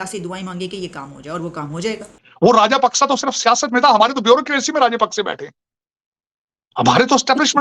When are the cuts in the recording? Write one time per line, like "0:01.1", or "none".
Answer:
0:02.1